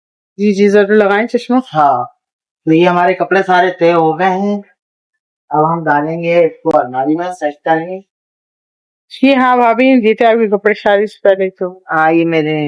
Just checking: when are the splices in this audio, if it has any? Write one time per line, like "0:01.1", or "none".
none